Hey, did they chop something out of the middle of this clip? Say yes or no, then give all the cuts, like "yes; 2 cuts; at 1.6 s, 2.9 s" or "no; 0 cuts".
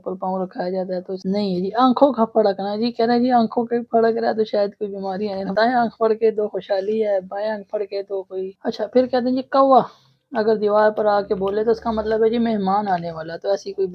yes; 2 cuts; at 1.2 s, 8.5 s